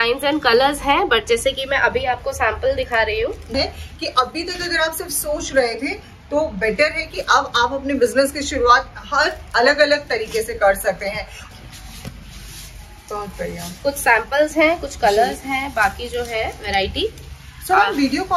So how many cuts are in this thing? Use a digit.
2